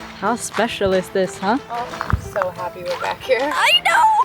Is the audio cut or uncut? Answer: cut